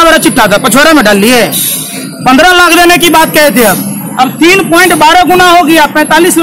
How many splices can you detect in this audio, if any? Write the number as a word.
zero